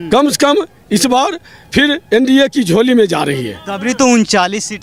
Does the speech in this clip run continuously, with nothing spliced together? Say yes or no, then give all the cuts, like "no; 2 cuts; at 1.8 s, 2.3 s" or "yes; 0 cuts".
yes; 0 cuts